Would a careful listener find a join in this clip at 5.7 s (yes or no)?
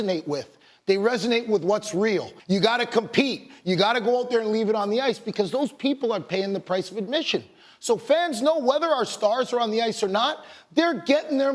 no